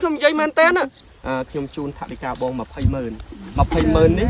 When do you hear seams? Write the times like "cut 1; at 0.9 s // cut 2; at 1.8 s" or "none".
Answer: cut 1; at 1.1 s